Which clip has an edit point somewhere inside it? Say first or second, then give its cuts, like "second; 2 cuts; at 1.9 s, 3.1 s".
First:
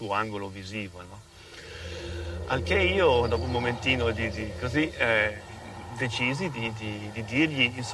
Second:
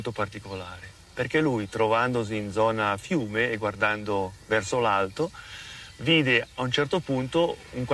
second; 1 cut; at 5.1 s